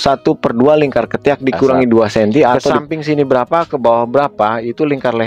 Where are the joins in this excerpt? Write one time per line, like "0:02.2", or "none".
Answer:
0:02.7